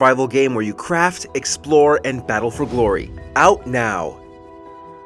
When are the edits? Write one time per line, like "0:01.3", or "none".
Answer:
0:04.2